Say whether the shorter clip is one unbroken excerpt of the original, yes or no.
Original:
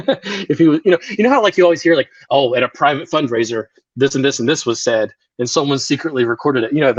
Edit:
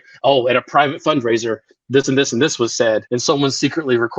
no